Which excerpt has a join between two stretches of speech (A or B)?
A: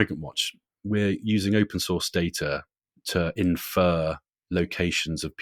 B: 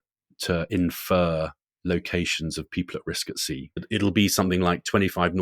B